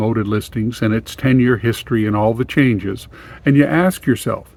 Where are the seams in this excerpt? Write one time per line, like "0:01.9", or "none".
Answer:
none